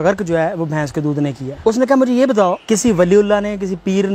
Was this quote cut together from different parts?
yes; 2 cuts; at 1.5 s, 2.6 s

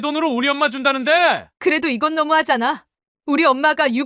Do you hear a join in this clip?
yes; 1 cut; at 1.5 s

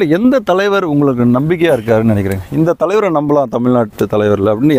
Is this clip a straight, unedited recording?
yes; 0 cuts

